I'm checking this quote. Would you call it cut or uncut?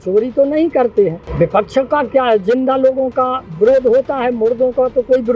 cut